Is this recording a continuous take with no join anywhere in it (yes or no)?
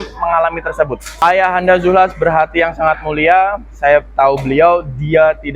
no